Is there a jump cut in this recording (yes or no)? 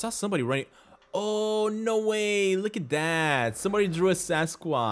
no